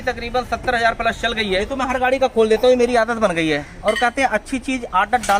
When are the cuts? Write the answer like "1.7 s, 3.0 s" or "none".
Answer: 1.6 s

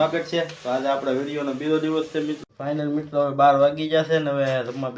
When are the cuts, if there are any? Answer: 2.4 s

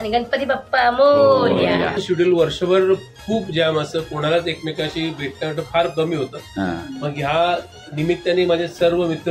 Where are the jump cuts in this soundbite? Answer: 2.0 s

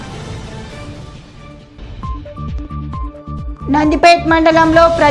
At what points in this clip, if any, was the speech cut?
2.6 s

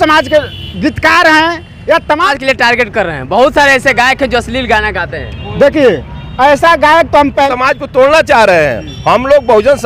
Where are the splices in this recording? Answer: 2.3 s, 7.5 s

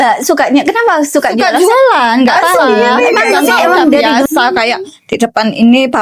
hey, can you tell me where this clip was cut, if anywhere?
4.3 s

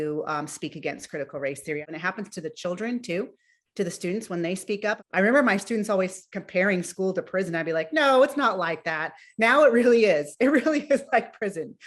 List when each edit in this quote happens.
1.8 s, 5.0 s

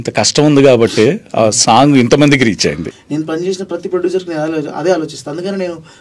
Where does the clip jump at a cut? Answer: 2.9 s

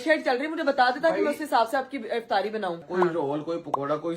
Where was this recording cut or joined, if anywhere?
2.8 s

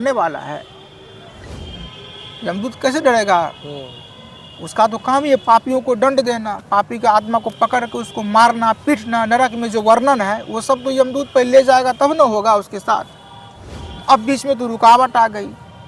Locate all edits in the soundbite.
1.5 s

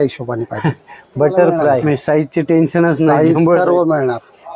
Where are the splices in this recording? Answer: 1.8 s

